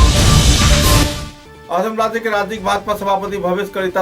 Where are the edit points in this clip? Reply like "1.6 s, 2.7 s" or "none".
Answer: 1.3 s